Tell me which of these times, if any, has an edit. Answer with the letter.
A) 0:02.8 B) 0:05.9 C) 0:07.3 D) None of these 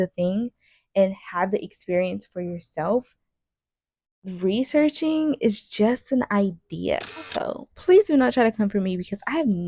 C